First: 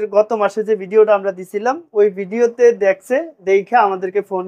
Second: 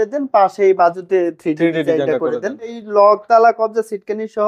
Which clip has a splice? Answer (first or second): second